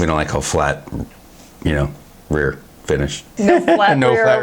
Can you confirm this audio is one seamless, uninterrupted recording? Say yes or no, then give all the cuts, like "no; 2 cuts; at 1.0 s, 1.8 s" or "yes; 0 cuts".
no; 1 cut; at 3.3 s